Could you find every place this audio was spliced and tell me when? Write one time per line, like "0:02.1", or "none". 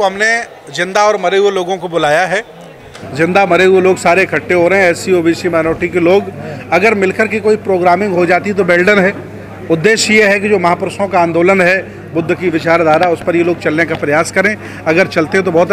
none